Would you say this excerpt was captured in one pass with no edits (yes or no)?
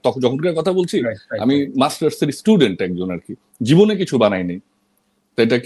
yes